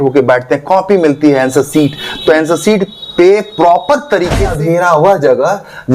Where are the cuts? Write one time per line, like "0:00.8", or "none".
0:04.5